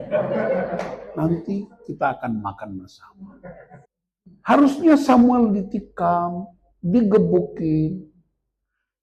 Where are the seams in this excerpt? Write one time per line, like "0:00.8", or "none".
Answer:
none